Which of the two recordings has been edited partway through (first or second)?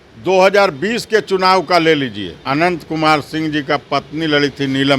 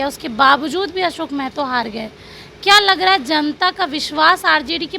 first